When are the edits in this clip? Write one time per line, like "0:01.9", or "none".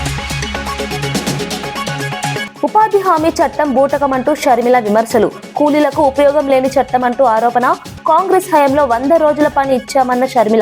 0:02.5